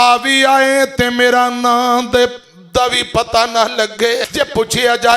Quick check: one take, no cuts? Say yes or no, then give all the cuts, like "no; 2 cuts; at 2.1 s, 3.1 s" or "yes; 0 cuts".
no; 1 cut; at 4.2 s